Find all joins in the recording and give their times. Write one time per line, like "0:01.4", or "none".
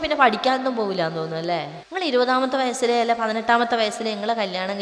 0:01.8